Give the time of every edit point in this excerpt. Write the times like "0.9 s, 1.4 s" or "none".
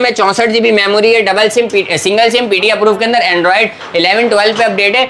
none